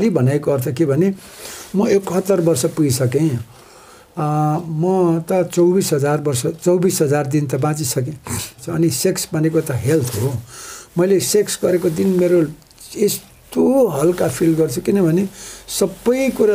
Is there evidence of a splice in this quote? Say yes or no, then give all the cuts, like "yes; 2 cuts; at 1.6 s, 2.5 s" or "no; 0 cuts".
yes; 1 cut; at 8.6 s